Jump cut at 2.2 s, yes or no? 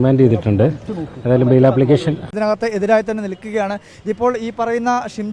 yes